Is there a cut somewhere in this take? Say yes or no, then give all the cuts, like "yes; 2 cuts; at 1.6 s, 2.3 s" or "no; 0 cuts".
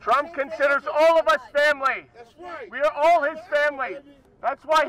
no; 0 cuts